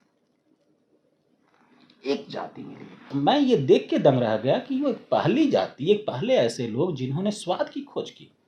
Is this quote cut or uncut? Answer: cut